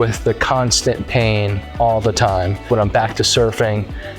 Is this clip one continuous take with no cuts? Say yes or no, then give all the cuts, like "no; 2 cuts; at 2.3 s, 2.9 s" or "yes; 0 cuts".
no; 1 cut; at 2.7 s